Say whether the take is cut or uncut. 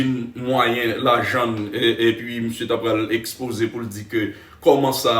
uncut